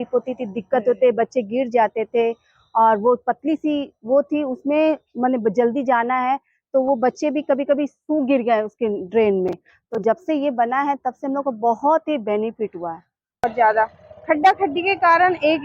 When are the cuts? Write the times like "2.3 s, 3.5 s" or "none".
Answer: 13.4 s